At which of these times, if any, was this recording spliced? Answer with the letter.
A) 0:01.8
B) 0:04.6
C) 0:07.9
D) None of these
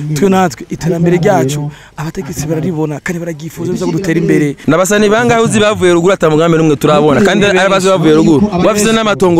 B